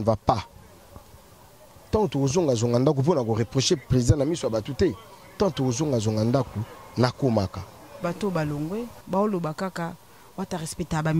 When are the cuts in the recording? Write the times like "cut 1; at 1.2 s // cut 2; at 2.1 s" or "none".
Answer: cut 1; at 8.0 s

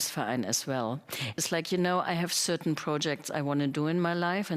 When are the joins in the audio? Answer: cut 1; at 1.3 s

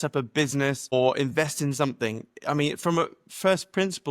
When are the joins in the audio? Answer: cut 1; at 0.9 s

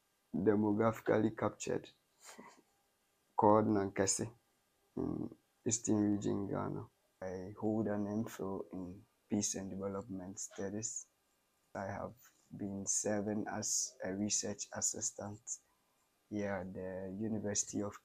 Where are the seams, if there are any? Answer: cut 1; at 7.2 s // cut 2; at 11.7 s

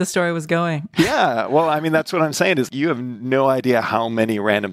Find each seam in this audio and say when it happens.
cut 1; at 0.8 s // cut 2; at 2.7 s

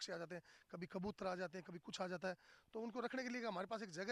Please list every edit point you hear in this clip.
none

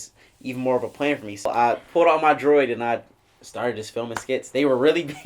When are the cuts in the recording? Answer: cut 1; at 1.5 s

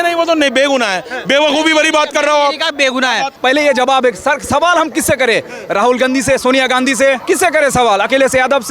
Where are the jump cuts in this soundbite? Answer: cut 1; at 3.4 s // cut 2; at 7.2 s

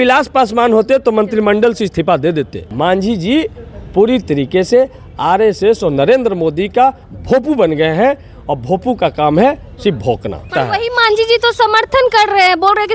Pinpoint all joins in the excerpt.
cut 1; at 2.6 s // cut 2; at 10.5 s

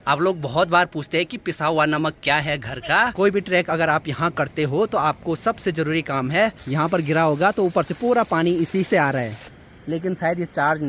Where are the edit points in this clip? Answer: cut 1; at 3.1 s // cut 2; at 6.6 s // cut 3; at 9.4 s

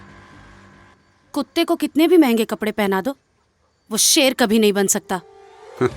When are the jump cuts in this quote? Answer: cut 1; at 0.9 s

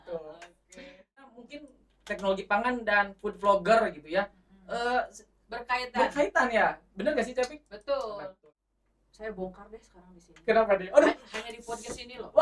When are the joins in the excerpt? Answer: cut 1; at 1.3 s // cut 2; at 8.3 s

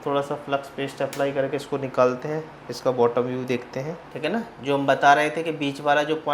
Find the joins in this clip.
cut 1; at 4.0 s

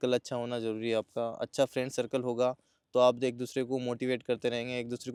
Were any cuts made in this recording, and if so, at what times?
none

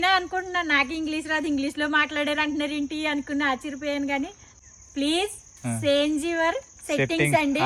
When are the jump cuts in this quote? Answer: cut 1; at 4.4 s

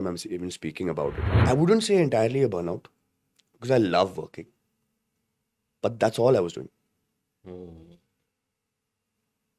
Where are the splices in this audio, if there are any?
cut 1; at 1.3 s

